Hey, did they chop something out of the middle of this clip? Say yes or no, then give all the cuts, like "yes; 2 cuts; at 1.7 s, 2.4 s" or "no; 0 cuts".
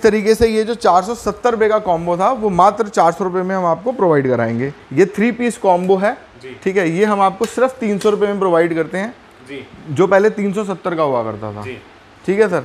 yes; 1 cut; at 4.8 s